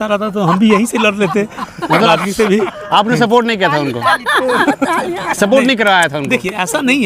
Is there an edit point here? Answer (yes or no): no